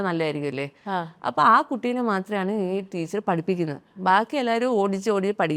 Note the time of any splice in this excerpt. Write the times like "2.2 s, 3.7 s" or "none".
none